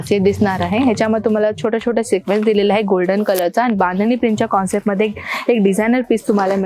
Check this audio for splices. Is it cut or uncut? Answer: uncut